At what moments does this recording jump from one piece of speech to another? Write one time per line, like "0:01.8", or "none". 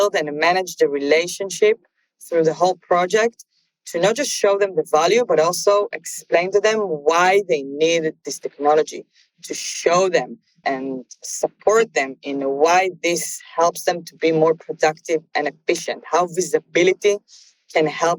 0:06.5
0:10.6